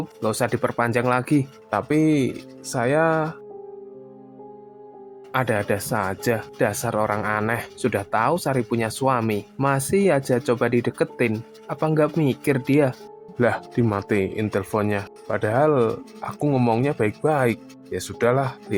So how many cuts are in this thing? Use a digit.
0